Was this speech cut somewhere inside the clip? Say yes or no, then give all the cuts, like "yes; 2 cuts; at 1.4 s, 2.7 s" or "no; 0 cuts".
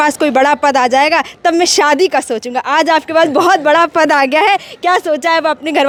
no; 0 cuts